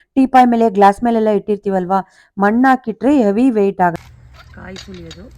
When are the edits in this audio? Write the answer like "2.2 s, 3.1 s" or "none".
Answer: 4.1 s